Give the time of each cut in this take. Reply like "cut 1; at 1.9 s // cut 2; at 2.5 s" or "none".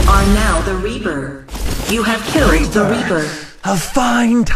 none